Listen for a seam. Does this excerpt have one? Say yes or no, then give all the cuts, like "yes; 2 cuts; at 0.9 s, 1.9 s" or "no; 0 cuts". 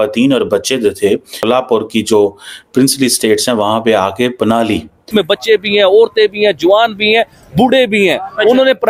yes; 2 cuts; at 1.4 s, 5.0 s